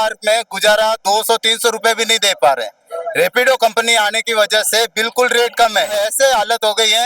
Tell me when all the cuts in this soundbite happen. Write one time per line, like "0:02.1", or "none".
0:05.9